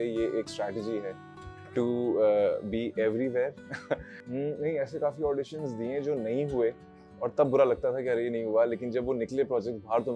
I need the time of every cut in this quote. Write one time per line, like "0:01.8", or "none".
0:04.2